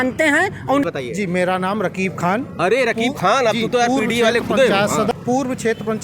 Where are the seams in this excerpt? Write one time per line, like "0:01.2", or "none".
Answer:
0:00.9
0:05.1